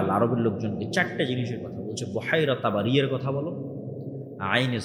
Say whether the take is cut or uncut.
uncut